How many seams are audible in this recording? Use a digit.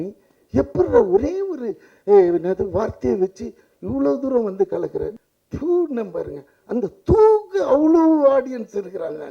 1